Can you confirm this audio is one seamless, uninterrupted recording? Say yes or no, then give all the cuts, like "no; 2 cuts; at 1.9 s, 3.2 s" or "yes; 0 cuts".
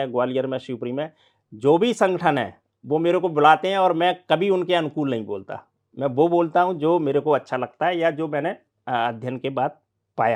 yes; 0 cuts